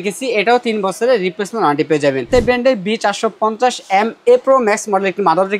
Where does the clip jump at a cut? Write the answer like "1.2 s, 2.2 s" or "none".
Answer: 2.3 s